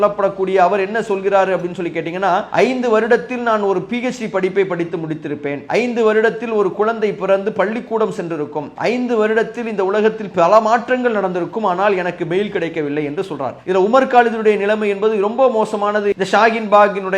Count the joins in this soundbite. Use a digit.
4